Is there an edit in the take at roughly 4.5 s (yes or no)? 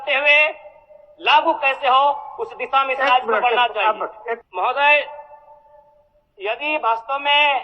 yes